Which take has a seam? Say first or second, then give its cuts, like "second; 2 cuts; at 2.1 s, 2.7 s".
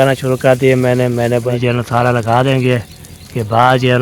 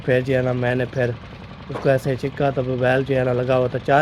first; 1 cut; at 1.5 s